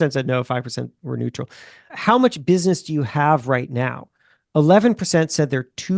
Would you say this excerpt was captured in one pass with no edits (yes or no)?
no